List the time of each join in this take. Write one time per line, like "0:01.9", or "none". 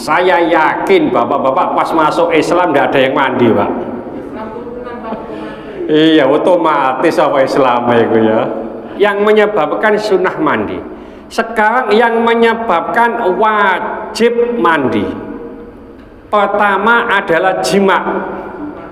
0:08.8